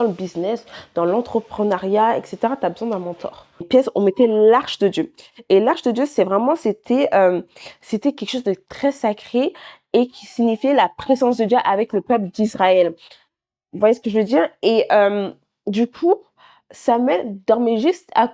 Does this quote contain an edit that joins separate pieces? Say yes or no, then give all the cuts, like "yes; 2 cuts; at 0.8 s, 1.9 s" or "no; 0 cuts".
yes; 1 cut; at 3.7 s